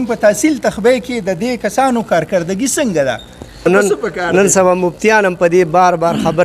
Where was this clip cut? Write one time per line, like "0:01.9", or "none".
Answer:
0:03.6